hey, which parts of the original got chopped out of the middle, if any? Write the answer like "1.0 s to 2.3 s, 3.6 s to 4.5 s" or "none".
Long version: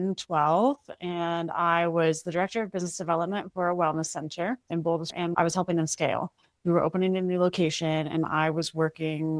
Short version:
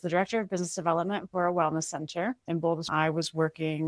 5.1 s to 8.3 s

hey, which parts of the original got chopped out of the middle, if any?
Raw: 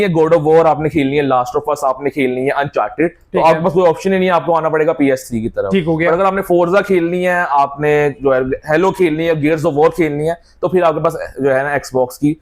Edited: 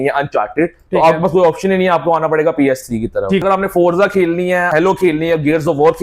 5.8 s to 6.2 s, 7.4 s to 8.6 s

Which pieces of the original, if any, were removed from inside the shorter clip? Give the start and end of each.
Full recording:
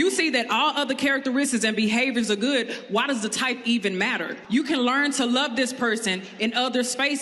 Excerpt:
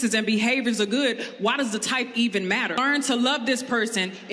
4.3 s to 4.9 s

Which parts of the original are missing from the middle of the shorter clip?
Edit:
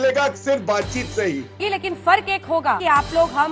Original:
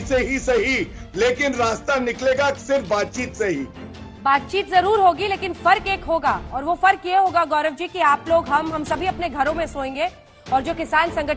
3.9 s to 5.2 s, 6.4 s to 7.9 s

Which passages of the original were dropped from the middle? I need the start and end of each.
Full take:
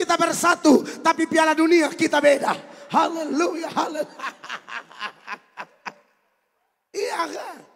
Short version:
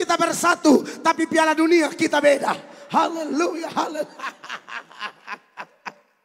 none

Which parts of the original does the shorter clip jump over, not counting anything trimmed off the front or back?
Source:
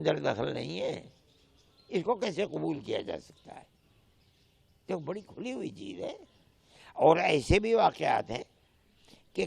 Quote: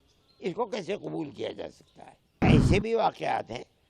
3.9 s to 7.2 s

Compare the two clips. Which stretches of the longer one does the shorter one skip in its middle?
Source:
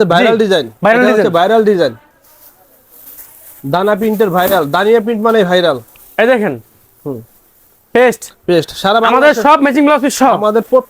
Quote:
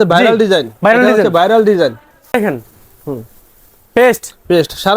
2.3 s to 6.3 s

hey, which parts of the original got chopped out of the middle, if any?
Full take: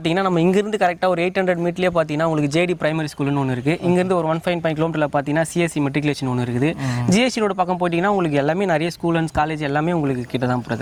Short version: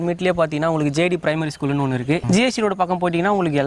3.8 s to 7.0 s

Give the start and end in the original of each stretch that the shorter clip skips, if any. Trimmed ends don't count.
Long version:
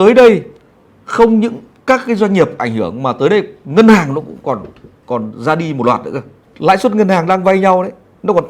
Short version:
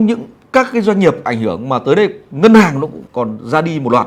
4.3 s to 4.9 s

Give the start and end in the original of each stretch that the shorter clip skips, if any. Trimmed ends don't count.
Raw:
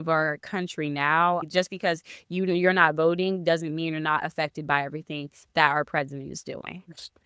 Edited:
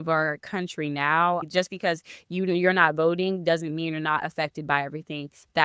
none

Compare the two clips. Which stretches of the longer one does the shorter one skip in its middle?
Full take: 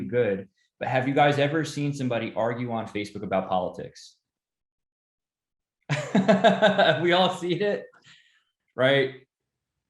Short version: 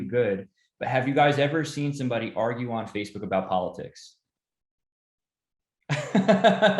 none

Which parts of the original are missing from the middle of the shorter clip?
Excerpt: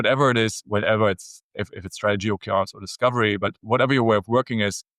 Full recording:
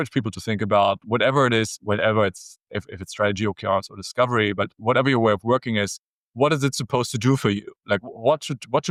none

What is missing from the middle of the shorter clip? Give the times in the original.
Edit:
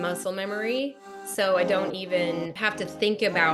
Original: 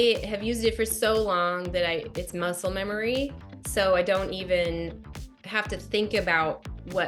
5.0 s to 5.5 s

